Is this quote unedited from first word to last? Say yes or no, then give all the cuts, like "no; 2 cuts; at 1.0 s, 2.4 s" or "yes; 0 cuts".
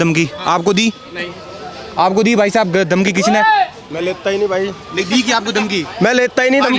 yes; 0 cuts